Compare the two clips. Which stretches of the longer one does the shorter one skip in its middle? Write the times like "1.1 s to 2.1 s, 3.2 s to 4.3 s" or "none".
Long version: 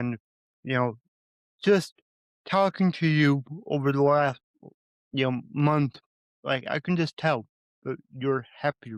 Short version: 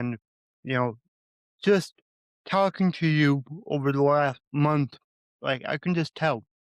4.4 s to 5.5 s